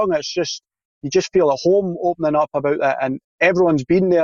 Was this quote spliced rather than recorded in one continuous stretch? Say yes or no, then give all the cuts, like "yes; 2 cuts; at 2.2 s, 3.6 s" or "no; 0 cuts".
yes; 1 cut; at 3.2 s